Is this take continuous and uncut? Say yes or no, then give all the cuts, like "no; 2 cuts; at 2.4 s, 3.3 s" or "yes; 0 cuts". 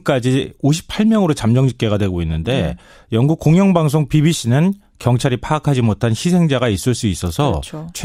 yes; 0 cuts